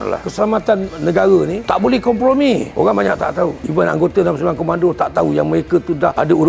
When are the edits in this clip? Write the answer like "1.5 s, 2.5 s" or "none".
2.7 s